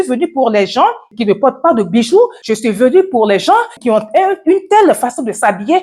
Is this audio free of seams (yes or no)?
no